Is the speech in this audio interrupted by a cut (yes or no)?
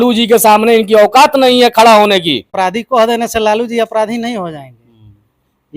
yes